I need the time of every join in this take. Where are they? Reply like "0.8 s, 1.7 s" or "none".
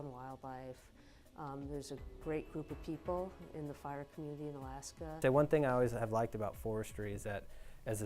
5.2 s